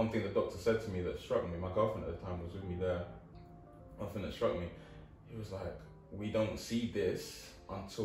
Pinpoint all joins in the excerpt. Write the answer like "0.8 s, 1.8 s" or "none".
none

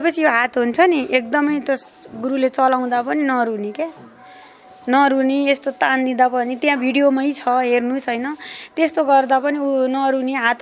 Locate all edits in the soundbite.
none

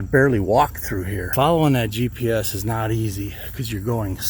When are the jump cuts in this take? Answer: 1.3 s

